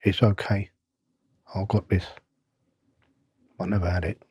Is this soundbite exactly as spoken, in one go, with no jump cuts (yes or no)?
yes